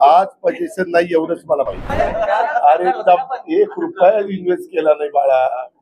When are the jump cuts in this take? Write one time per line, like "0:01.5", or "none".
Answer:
0:01.9